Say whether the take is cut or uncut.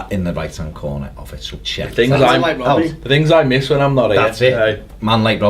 uncut